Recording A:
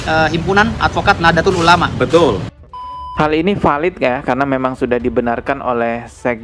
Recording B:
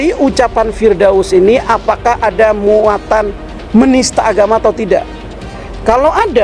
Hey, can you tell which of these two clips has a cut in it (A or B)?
A